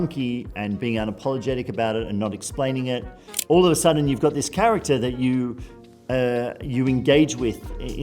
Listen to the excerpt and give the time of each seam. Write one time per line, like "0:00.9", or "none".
0:03.0